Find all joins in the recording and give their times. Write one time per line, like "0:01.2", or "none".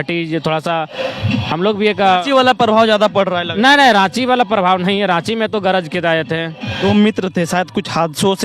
0:06.8